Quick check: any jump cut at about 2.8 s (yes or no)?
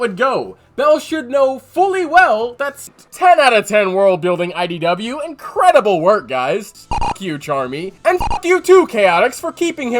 yes